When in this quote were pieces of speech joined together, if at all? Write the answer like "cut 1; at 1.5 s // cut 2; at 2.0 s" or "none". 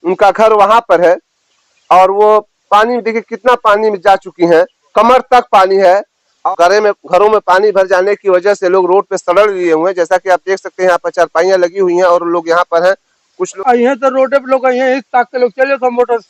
cut 1; at 6.4 s // cut 2; at 13.5 s